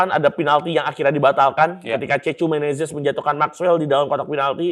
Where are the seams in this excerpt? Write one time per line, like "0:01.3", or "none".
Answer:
none